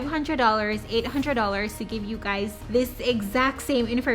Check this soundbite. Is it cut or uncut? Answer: cut